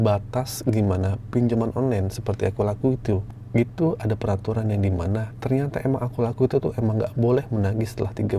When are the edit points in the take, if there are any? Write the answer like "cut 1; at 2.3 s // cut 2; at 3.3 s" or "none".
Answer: cut 1; at 3.3 s // cut 2; at 5.3 s